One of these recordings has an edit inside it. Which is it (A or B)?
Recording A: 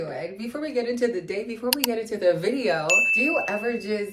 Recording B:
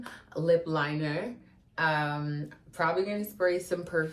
A